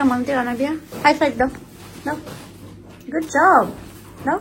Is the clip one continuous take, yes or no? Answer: yes